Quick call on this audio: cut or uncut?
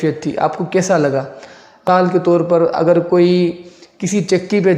cut